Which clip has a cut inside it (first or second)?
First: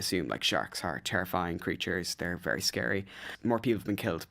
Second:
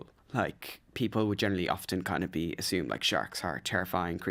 first